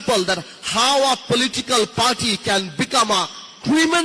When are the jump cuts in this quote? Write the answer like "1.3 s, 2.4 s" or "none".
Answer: none